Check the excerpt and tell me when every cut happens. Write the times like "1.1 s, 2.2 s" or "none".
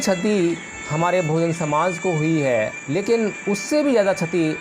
2.8 s